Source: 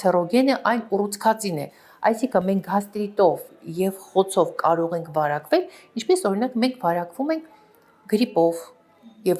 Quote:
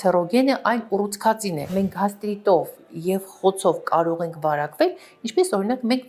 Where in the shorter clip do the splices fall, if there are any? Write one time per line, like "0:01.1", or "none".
0:01.7